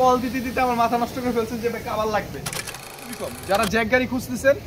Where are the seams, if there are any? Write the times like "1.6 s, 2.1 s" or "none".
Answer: 2.9 s